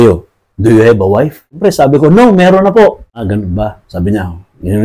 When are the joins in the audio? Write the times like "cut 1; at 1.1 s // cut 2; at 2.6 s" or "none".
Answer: cut 1; at 1.6 s // cut 2; at 3.3 s